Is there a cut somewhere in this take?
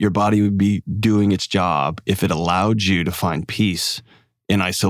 no; 0 cuts

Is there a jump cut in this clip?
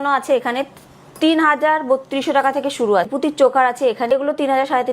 yes; 2 cuts; at 3.1 s, 4.1 s

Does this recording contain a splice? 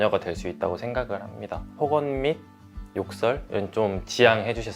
yes; 1 cut; at 1.7 s

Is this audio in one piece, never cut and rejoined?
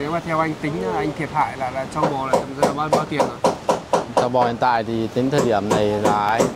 yes; 0 cuts

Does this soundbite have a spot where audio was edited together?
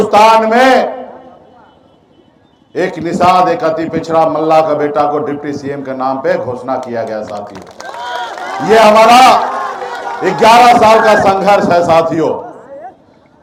no; 0 cuts

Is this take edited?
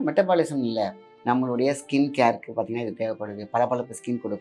yes; 1 cut; at 1.1 s

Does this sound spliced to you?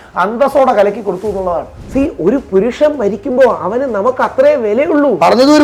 yes; 1 cut; at 1.8 s

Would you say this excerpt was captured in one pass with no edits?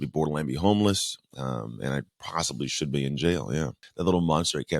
no; 1 cut; at 3.8 s

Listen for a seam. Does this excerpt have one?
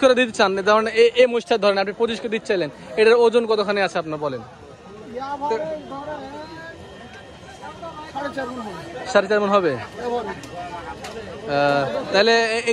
no; 0 cuts

